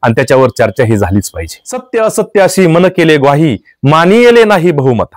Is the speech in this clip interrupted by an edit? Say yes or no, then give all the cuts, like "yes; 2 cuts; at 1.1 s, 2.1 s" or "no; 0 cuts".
yes; 1 cut; at 1.9 s